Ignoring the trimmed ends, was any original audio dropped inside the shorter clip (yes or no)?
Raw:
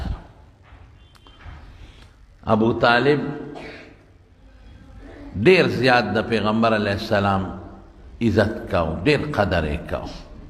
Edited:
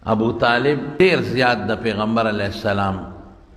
yes